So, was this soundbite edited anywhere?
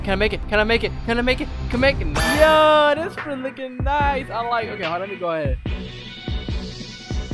yes; 1 cut; at 2.1 s

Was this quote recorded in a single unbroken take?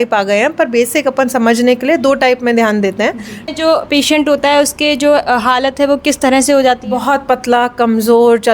no; 1 cut; at 3.5 s

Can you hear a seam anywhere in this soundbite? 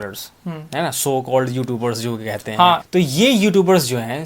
yes; 1 cut; at 2.9 s

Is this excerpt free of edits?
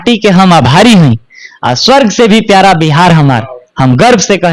yes; 0 cuts

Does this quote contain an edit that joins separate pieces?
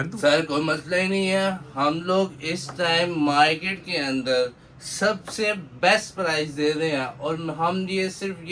no; 0 cuts

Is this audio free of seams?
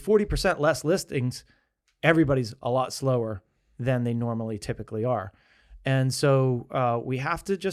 yes; 0 cuts

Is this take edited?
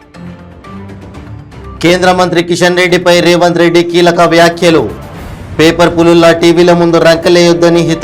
no; 0 cuts

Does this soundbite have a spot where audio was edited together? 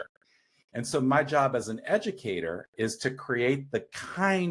no; 0 cuts

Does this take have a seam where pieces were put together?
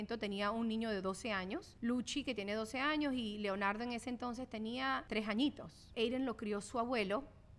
yes; 3 cuts; at 1.7 s, 5.0 s, 5.9 s

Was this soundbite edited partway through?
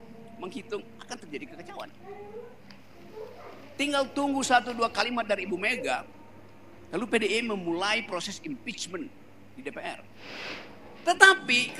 yes; 1 cut; at 10.2 s

